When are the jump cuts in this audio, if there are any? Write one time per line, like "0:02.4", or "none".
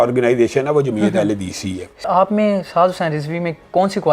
0:02.0